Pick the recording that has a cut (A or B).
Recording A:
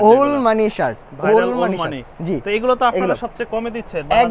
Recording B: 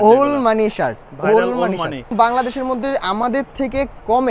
B